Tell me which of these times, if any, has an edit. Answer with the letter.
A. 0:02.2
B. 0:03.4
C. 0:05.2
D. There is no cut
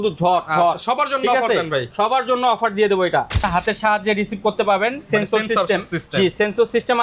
B